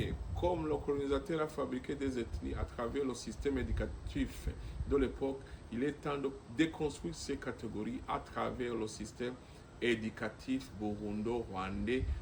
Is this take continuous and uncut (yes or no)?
yes